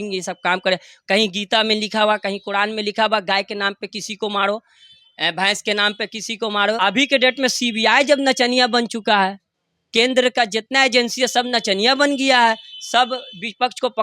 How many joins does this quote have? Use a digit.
1